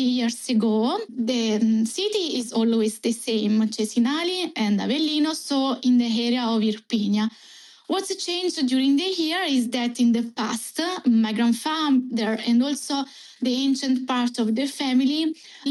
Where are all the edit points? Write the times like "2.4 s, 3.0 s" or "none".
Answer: none